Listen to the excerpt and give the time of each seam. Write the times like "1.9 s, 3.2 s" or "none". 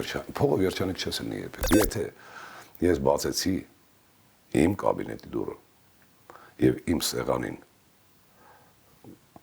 1.7 s